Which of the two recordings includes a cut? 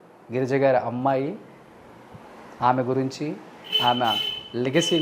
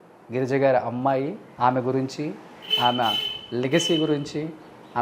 second; 1 cut; at 1.4 s

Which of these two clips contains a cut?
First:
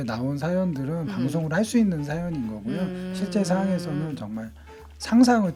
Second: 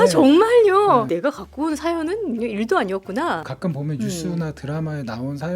second; 2 cuts; at 1.1 s, 3.5 s

